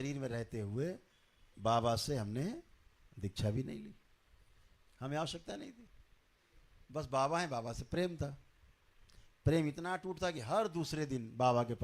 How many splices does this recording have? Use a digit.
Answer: 0